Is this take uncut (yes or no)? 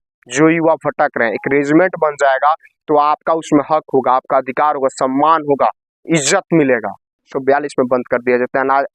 no